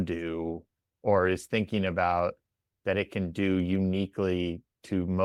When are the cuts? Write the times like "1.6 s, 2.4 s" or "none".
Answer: none